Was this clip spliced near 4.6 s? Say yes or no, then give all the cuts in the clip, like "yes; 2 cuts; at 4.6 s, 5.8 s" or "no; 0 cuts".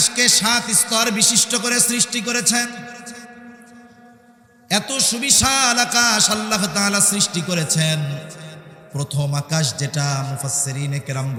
no; 0 cuts